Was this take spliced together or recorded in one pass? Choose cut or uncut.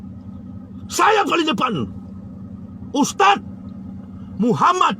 uncut